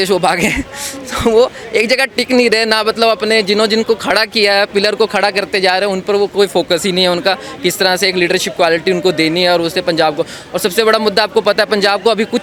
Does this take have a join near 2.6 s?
no; 0 cuts

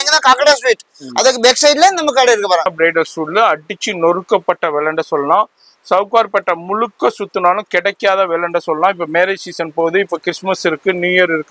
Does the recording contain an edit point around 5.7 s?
no; 1 cut; at 2.7 s

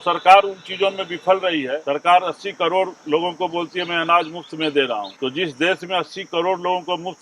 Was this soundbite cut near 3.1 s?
no; 2 cuts; at 1.8 s, 5.1 s

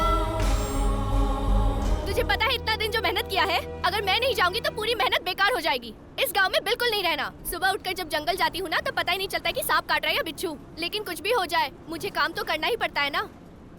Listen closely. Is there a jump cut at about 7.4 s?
yes; 2 cuts; at 2.0 s, 7.4 s

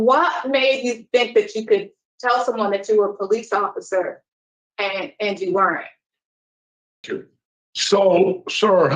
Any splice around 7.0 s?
yes; 1 cut; at 7.0 s

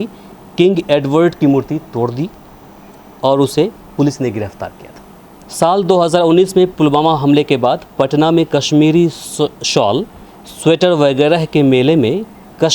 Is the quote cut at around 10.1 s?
no; 1 cut; at 5.4 s

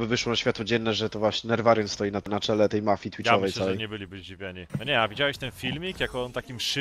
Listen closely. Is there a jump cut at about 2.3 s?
yes; 2 cuts; at 2.3 s, 4.7 s

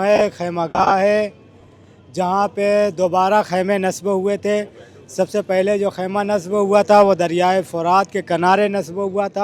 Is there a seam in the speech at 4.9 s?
no; 0 cuts

